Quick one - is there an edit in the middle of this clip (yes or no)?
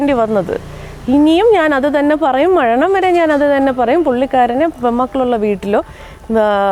no